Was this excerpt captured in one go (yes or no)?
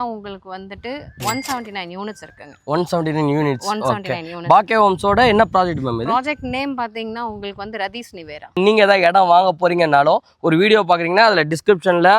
no